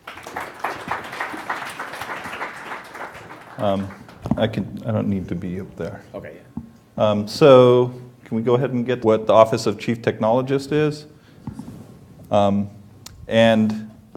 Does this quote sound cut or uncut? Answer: uncut